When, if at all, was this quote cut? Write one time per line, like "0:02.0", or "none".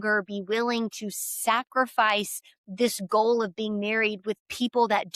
none